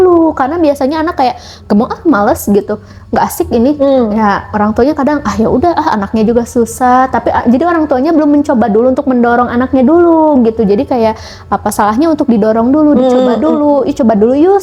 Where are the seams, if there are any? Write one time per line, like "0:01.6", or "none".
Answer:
none